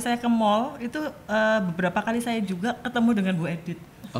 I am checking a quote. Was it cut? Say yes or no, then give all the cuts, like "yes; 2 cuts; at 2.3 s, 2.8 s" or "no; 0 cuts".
no; 0 cuts